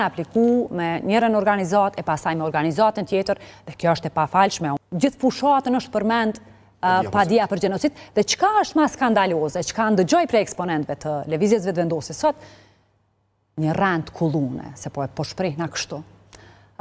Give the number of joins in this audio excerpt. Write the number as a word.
one